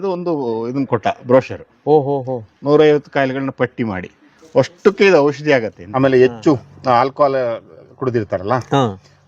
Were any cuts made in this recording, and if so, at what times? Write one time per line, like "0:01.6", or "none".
0:05.8